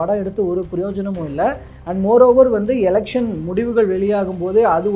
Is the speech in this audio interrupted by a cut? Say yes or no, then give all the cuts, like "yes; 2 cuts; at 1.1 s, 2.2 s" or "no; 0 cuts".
no; 0 cuts